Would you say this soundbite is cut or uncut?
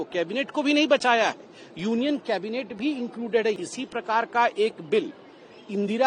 cut